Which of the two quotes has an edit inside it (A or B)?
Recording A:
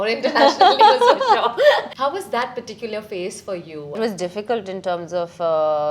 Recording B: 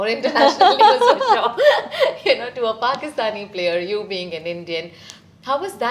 A